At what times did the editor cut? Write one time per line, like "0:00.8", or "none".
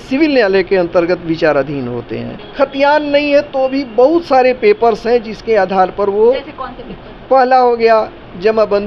0:02.4